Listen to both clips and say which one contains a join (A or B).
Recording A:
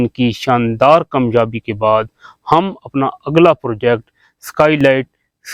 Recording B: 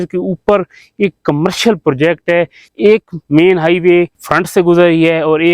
B